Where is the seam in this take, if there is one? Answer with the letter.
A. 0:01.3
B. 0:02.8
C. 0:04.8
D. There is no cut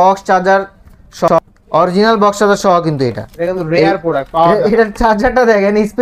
A